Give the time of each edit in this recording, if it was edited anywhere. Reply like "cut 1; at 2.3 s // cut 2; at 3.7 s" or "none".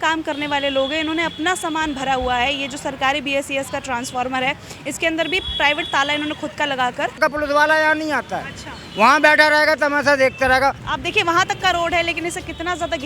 cut 1; at 7.2 s // cut 2; at 10.9 s